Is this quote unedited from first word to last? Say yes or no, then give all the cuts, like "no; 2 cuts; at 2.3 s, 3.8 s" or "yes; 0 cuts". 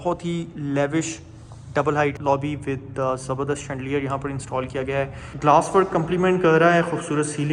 no; 2 cuts; at 2.2 s, 5.2 s